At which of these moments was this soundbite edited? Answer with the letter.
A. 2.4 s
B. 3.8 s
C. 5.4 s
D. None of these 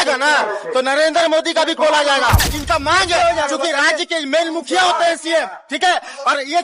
A